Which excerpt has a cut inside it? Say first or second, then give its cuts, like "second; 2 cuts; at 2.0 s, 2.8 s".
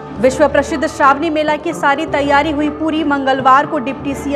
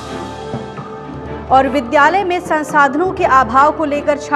second; 1 cut; at 1.0 s